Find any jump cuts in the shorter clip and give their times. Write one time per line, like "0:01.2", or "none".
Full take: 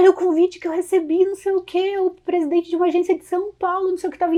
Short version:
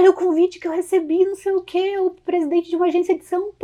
none